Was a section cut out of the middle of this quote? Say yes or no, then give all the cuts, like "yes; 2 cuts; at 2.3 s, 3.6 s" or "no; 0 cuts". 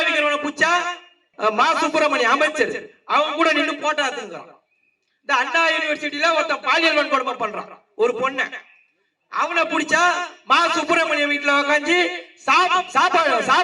yes; 1 cut; at 1.3 s